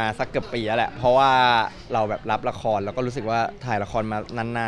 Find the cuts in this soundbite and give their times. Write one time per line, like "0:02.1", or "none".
none